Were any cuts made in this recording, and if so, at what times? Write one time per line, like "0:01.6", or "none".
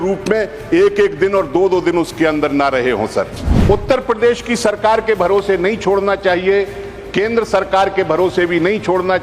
0:03.5